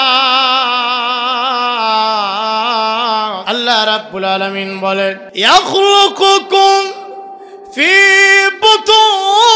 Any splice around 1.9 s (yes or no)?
no